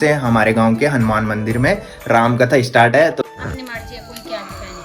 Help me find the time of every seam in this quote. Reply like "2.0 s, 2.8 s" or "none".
3.3 s

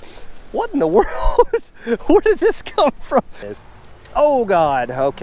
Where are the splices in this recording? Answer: 3.4 s

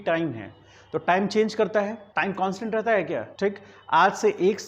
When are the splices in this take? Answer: 2.0 s, 3.3 s

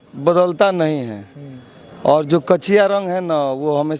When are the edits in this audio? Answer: none

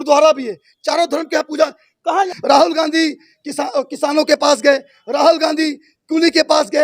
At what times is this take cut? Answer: 2.3 s

